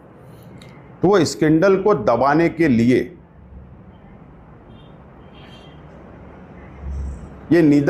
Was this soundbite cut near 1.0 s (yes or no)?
no